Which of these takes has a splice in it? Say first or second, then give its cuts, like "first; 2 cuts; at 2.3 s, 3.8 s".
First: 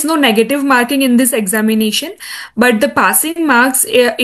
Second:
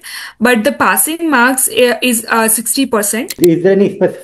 second; 1 cut; at 3.3 s